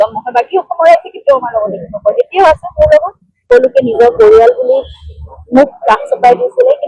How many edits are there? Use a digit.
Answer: 1